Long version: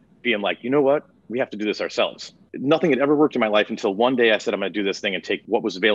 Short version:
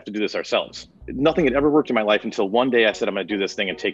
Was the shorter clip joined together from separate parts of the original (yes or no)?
no